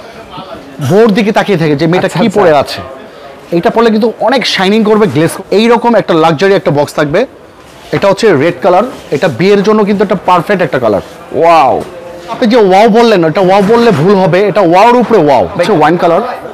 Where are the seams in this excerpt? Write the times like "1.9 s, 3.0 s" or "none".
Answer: 5.3 s, 12.4 s, 15.6 s